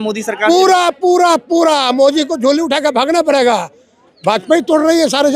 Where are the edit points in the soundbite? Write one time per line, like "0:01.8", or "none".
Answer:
0:04.0